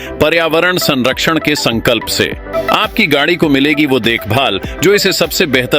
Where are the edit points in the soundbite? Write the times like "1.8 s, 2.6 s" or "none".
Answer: 2.5 s